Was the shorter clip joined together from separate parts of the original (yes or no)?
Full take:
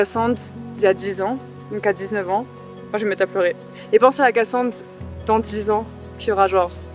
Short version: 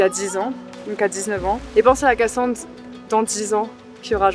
yes